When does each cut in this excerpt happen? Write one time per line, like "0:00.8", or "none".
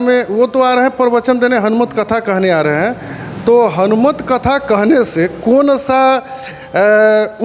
none